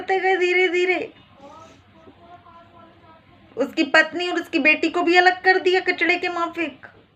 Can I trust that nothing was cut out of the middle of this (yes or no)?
yes